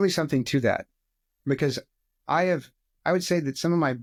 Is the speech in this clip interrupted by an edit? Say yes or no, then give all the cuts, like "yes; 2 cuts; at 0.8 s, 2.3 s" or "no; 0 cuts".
no; 0 cuts